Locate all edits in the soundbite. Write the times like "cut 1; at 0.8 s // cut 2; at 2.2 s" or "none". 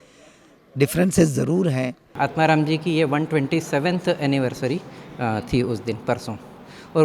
cut 1; at 2.1 s